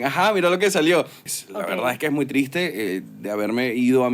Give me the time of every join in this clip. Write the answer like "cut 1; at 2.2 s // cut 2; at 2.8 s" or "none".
cut 1; at 1.3 s